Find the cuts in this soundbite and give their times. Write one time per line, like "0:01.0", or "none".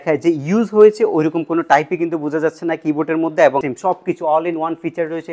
0:03.7